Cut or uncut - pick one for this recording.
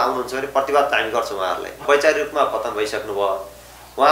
cut